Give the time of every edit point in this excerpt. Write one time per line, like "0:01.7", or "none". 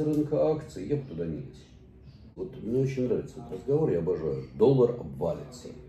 0:02.3